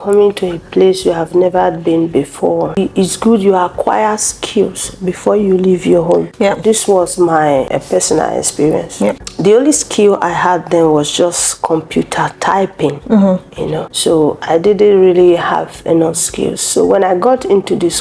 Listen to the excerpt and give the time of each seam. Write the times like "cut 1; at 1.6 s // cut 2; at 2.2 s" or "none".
cut 1; at 2.8 s // cut 2; at 6.3 s // cut 3; at 7.7 s // cut 4; at 9.3 s // cut 5; at 13.9 s